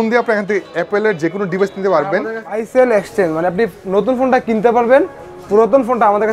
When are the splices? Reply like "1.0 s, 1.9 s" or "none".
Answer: 2.5 s